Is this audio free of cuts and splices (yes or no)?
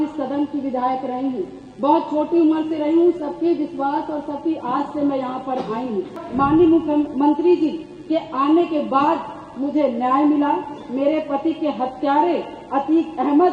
no